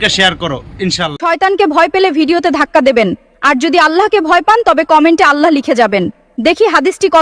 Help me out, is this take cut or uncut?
cut